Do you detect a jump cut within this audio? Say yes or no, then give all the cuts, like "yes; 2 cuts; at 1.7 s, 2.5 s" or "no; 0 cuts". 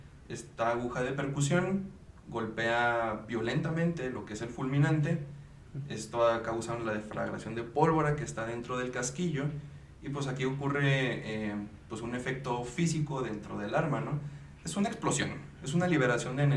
no; 0 cuts